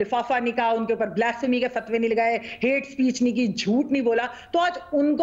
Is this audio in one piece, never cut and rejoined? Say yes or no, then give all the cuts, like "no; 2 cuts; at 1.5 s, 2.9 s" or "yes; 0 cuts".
yes; 0 cuts